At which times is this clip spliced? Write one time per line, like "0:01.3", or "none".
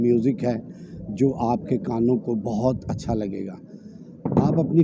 none